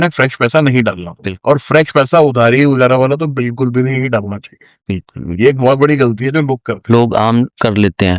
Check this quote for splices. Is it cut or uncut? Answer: uncut